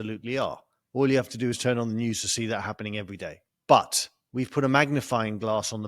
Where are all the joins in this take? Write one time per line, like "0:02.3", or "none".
0:03.5